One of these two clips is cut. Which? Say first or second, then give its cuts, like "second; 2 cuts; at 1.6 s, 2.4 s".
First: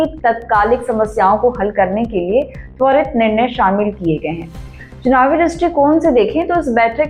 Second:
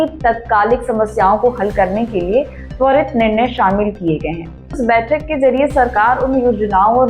second; 1 cut; at 4.8 s